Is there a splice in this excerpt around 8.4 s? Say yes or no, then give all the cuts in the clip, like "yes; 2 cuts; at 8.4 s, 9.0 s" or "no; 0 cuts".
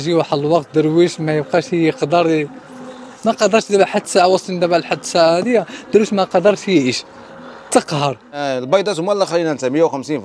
yes; 1 cut; at 8.4 s